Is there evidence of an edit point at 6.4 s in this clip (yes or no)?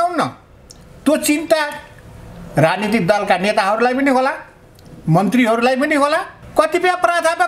yes